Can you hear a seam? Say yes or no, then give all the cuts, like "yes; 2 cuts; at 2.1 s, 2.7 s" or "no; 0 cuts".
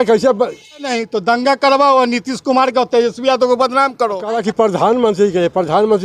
yes; 2 cuts; at 0.9 s, 4.3 s